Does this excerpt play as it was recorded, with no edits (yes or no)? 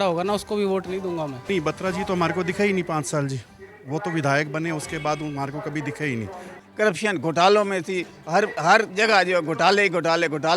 no